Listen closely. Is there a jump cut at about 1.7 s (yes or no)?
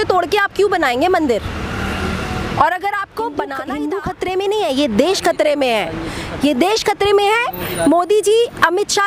no